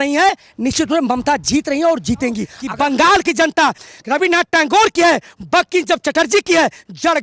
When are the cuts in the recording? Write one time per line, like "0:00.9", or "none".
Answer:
0:02.6
0:03.8